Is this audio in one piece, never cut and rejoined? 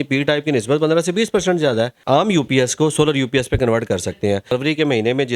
no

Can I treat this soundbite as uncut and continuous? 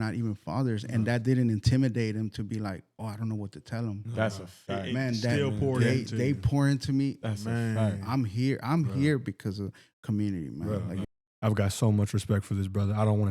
no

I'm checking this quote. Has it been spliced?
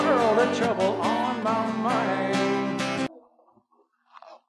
yes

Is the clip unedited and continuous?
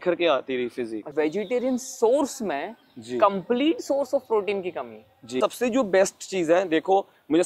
no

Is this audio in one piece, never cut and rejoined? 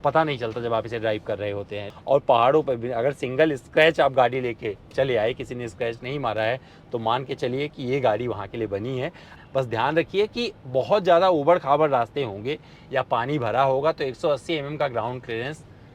no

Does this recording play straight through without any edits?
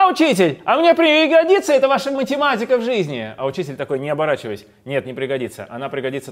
yes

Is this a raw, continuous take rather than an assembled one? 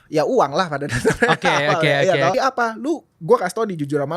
no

